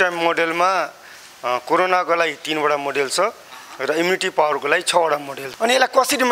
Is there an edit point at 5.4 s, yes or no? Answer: yes